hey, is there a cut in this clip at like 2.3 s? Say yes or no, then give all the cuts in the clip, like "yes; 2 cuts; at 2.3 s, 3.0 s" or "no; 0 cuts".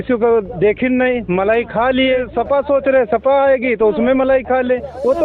yes; 1 cut; at 2.3 s